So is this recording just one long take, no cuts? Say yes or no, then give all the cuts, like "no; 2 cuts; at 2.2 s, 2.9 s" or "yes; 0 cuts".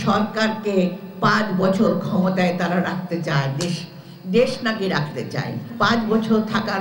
no; 1 cut; at 5.7 s